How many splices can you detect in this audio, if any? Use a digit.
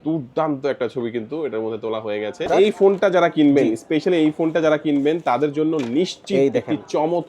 1